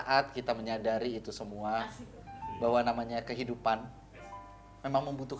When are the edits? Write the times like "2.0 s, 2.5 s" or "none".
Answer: none